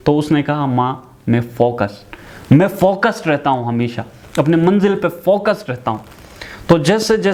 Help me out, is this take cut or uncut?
uncut